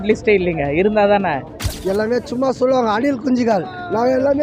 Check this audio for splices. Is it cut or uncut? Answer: uncut